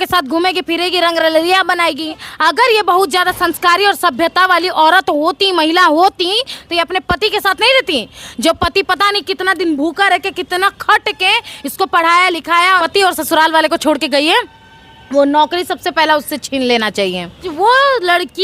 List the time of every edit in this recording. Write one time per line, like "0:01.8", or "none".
0:02.3
0:12.9
0:17.5